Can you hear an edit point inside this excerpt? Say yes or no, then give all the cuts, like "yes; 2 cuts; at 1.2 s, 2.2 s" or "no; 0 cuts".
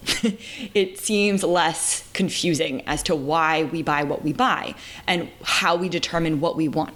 no; 0 cuts